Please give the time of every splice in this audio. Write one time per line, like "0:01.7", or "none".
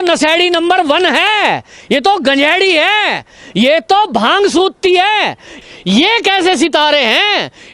0:05.5